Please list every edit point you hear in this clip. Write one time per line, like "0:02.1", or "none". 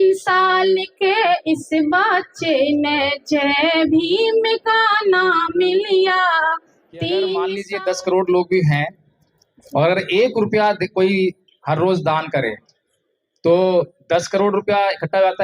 0:07.7